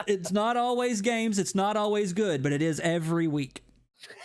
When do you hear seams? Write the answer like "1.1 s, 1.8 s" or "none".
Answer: none